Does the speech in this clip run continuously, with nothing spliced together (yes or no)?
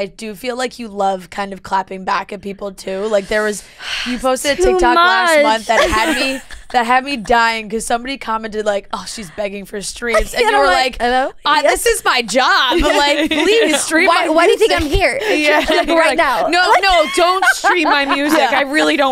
yes